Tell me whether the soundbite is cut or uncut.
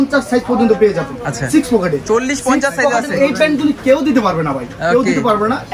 uncut